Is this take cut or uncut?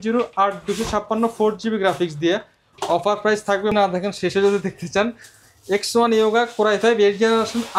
cut